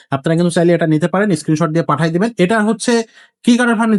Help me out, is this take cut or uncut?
uncut